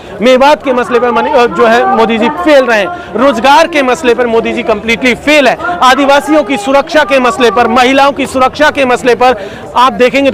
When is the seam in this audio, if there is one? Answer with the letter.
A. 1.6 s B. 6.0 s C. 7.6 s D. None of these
D